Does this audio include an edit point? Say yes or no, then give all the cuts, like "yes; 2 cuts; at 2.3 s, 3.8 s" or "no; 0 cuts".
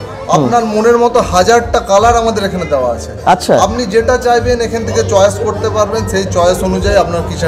no; 0 cuts